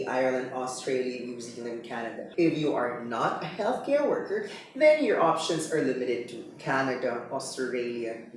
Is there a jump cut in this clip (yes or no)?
yes